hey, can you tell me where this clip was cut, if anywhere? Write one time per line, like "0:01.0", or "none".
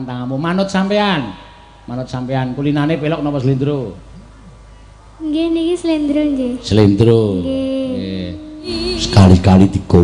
0:08.8